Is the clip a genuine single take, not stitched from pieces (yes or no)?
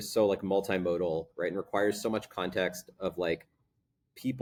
yes